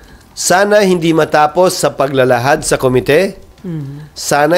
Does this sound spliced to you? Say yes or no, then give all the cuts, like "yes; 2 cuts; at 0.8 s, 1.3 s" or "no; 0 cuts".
no; 0 cuts